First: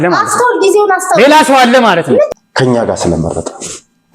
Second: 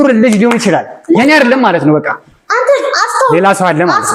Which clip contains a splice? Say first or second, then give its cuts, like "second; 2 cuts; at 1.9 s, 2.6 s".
first; 1 cut; at 2.3 s